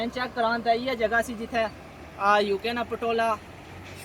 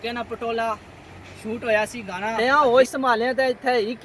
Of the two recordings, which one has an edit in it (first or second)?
second